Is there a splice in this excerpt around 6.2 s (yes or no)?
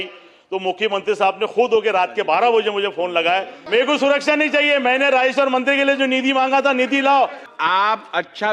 no